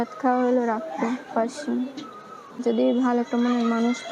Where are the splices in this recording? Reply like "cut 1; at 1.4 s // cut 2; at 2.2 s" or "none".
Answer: cut 1; at 2.6 s